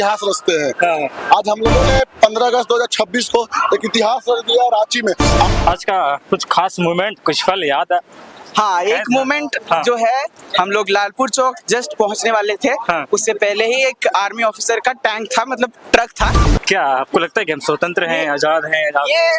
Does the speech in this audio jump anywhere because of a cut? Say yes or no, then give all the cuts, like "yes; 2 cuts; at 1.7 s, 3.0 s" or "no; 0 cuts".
yes; 2 cuts; at 5.5 s, 16.4 s